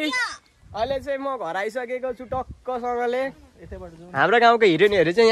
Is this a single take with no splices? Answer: yes; 0 cuts

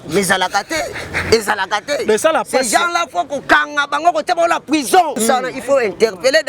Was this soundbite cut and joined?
yes; 1 cut; at 5.2 s

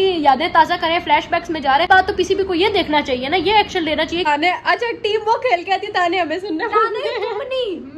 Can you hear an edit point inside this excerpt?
yes; 2 cuts; at 1.9 s, 4.3 s

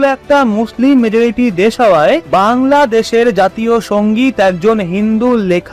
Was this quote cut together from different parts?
no; 0 cuts

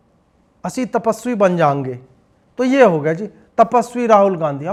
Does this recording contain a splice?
no; 0 cuts

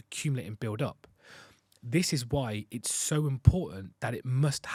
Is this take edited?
no; 0 cuts

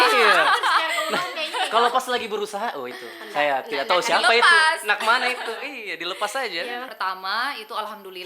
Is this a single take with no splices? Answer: no; 1 cut; at 6.9 s

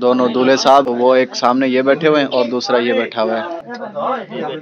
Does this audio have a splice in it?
yes; 2 cuts; at 0.9 s, 3.7 s

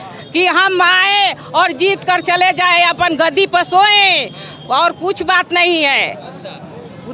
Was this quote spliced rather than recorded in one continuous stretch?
no; 0 cuts

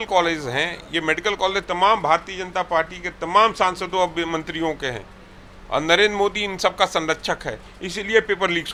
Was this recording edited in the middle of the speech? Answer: no; 0 cuts

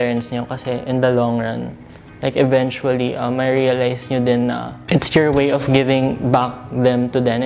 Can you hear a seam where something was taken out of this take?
no; 0 cuts

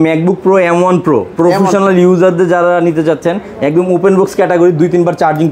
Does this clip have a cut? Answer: no; 0 cuts

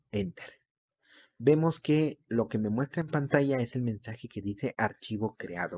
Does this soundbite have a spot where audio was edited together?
no; 0 cuts

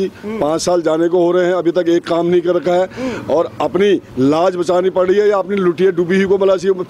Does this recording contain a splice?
no; 0 cuts

